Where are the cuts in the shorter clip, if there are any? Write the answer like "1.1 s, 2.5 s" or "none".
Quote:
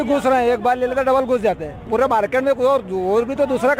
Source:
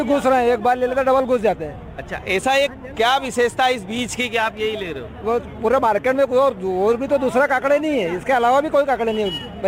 1.8 s